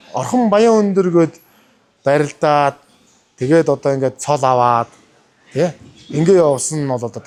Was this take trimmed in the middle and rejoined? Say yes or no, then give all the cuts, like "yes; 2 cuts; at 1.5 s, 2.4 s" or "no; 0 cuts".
no; 0 cuts